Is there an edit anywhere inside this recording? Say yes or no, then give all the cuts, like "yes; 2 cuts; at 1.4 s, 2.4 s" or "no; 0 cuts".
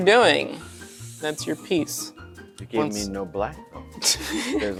no; 0 cuts